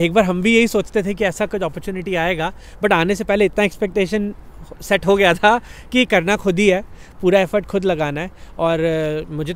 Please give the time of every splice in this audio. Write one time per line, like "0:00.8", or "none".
none